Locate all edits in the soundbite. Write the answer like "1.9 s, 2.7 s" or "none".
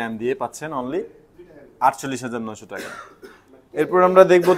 none